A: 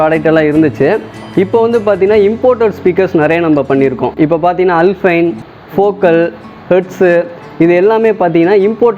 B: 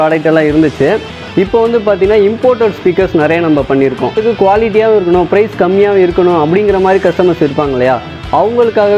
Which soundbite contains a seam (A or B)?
B